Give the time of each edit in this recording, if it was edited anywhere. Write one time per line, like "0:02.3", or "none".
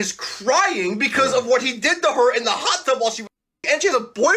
none